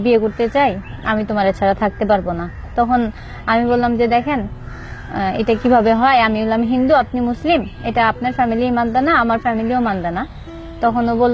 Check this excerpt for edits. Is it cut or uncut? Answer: uncut